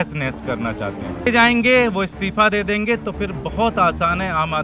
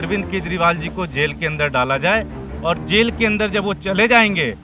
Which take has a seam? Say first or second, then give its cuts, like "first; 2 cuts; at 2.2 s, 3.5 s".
first; 1 cut; at 1.3 s